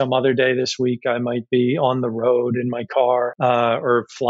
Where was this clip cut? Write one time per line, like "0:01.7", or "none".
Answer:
0:03.3